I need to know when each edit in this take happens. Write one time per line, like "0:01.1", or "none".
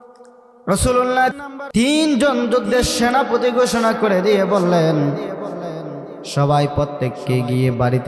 0:01.4